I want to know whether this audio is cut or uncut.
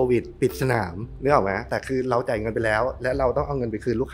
cut